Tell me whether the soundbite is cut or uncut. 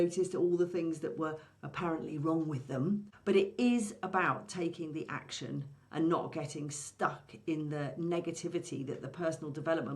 cut